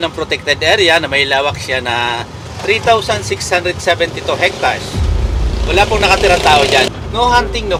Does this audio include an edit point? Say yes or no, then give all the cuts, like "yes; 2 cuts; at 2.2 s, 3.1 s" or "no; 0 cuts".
no; 0 cuts